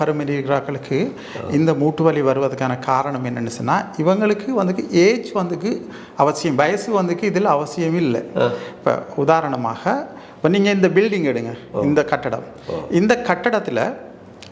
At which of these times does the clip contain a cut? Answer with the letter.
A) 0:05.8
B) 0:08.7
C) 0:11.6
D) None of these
D